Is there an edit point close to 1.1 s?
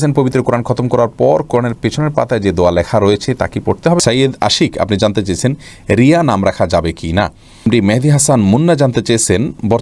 no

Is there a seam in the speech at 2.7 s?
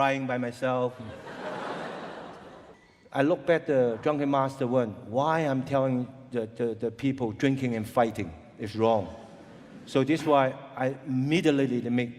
yes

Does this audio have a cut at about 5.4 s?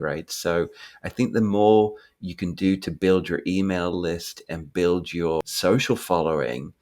yes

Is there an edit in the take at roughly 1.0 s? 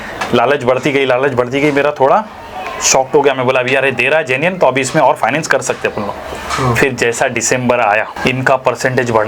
no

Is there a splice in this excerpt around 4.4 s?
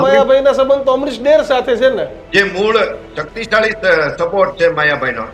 no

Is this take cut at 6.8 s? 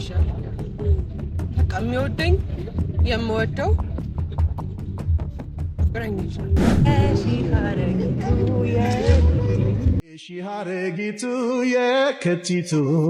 yes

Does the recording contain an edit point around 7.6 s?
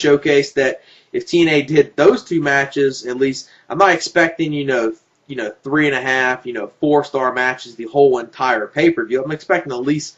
yes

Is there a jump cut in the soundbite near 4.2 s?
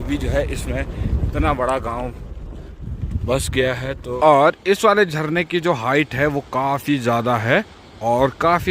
yes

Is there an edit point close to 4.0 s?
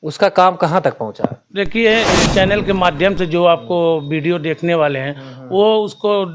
no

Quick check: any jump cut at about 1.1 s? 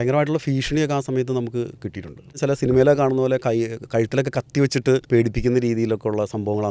no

